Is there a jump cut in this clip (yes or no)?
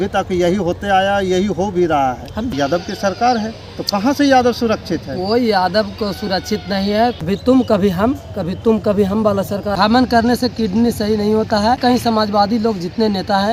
yes